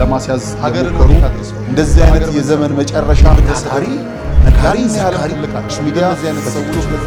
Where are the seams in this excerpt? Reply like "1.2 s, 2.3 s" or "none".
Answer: none